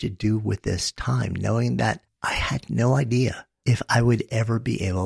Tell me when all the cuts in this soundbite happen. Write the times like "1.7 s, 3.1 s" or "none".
2.1 s, 3.5 s